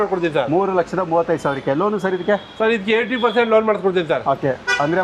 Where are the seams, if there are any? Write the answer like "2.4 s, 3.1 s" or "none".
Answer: none